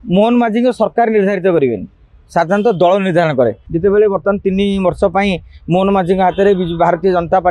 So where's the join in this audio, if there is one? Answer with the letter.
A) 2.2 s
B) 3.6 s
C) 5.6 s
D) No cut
B